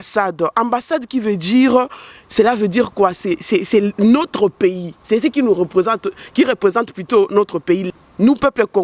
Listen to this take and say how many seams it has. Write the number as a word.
one